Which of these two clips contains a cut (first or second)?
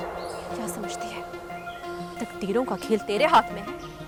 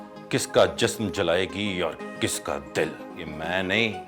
second